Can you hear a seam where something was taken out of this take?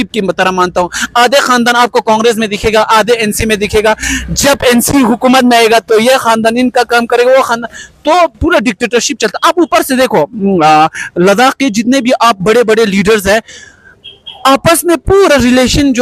no; 0 cuts

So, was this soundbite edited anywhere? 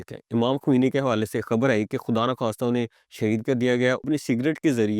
yes; 1 cut; at 4.1 s

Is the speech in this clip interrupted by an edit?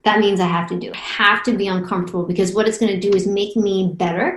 yes; 1 cut; at 1.0 s

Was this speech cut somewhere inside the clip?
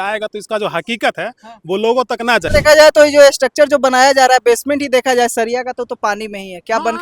yes; 1 cut; at 2.5 s

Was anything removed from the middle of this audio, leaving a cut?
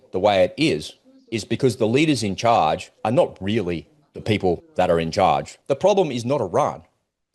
yes; 1 cut; at 5.6 s

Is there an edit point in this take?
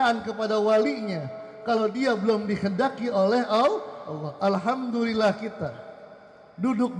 no; 0 cuts

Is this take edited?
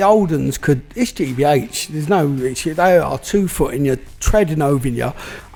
no; 0 cuts

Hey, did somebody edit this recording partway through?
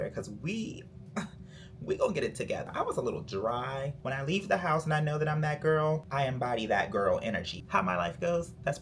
yes; 3 cuts; at 2.6 s, 3.9 s, 7.6 s

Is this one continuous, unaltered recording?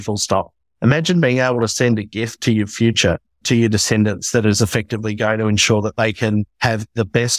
no; 2 cuts; at 3.4 s, 6.5 s

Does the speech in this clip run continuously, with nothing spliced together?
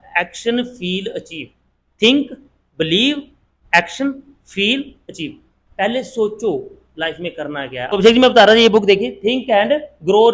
no; 1 cut; at 7.9 s

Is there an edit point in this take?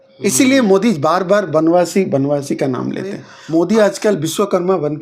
yes; 1 cut; at 3.3 s

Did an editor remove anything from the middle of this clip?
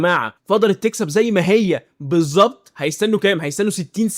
no; 0 cuts

